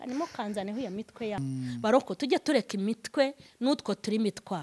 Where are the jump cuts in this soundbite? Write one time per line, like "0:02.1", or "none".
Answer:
0:01.4